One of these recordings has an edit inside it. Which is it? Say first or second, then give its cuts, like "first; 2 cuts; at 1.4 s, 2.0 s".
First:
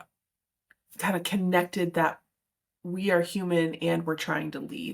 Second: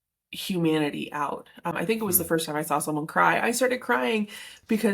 second; 1 cut; at 1.7 s